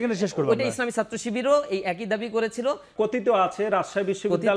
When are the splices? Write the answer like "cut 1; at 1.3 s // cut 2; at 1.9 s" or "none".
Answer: cut 1; at 2.9 s